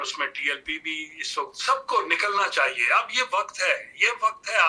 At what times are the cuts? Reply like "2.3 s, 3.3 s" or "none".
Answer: 1.6 s

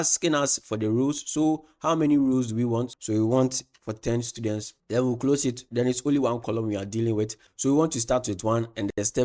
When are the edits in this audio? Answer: 2.9 s, 4.7 s

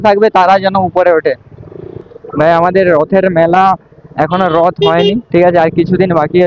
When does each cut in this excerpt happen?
1.9 s

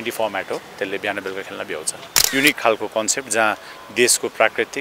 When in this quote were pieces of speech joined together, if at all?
2.1 s

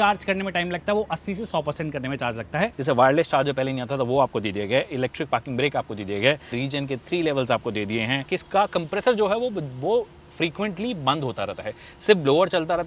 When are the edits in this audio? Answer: 2.8 s, 6.5 s, 8.3 s

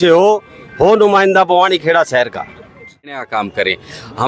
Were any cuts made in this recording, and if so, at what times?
3.2 s

